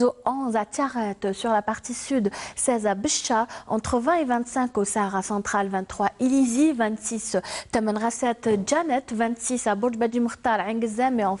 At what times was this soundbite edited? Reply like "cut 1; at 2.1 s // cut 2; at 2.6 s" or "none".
cut 1; at 5.0 s